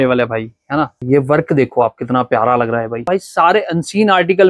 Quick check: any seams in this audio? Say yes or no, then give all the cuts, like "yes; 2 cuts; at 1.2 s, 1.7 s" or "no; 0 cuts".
yes; 2 cuts; at 1.0 s, 3.1 s